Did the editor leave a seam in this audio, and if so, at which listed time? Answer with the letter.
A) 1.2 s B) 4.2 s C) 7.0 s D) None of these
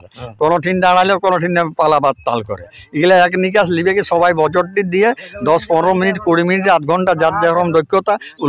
D